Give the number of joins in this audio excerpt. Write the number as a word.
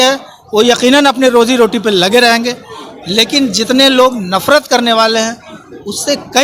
zero